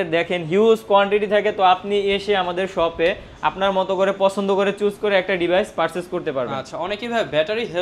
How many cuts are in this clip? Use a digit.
0